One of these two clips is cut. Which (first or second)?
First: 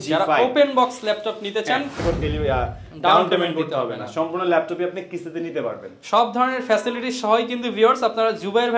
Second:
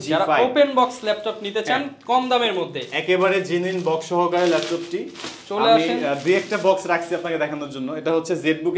first